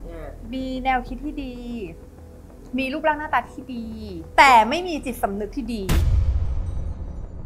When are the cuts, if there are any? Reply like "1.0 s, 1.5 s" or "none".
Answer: none

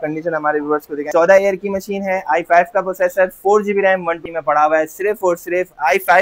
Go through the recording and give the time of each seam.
1.1 s, 4.2 s

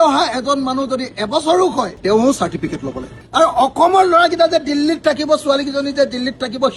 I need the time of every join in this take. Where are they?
3.2 s

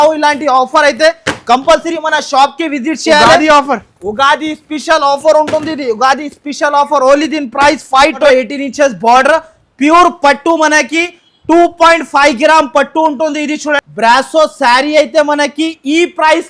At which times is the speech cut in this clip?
8.2 s, 13.8 s

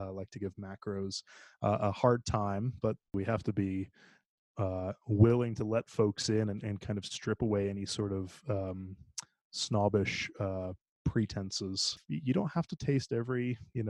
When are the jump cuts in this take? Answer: 3.1 s, 12.0 s

